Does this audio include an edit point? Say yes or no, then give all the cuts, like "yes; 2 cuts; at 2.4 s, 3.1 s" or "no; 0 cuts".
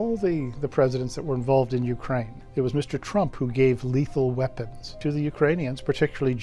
yes; 2 cuts; at 2.4 s, 5.0 s